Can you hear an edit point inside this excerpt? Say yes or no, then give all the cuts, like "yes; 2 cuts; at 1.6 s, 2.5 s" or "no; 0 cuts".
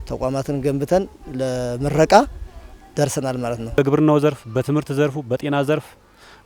yes; 1 cut; at 3.8 s